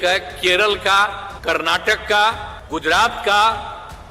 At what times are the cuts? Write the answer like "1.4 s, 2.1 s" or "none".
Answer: 1.3 s, 2.5 s